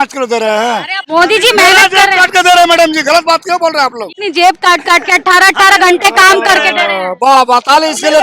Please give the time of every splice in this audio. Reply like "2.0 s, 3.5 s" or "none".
1.0 s, 4.1 s